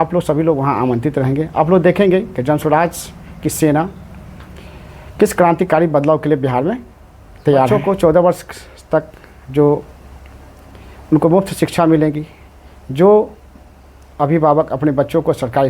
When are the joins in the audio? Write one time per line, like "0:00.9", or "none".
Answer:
0:07.7

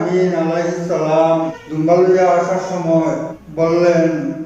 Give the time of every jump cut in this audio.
0:01.6
0:03.4

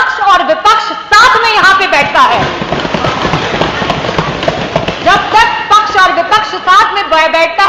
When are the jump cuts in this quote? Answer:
none

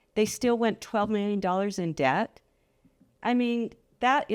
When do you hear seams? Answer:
none

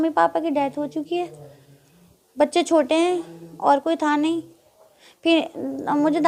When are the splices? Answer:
none

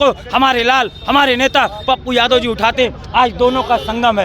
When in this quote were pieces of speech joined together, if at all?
none

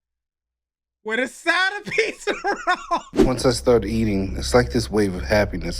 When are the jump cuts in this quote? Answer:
0:03.2

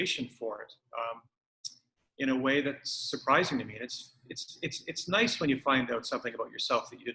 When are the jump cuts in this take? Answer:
none

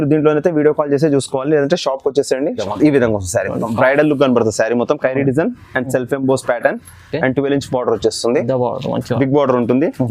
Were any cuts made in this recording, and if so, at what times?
0:02.6

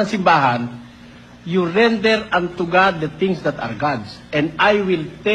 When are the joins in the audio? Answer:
0:03.5

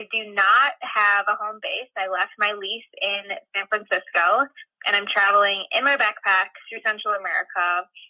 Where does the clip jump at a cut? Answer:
none

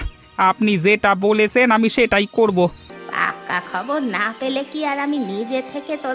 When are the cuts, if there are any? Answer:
0:02.9

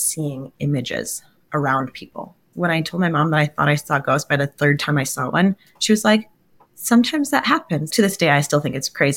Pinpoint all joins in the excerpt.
0:02.5
0:07.9

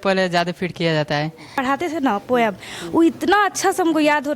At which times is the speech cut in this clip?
0:01.5

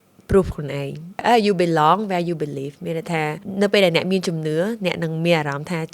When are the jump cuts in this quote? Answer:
0:01.2
0:03.4

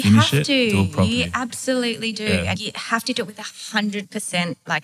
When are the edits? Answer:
0:02.5
0:04.1

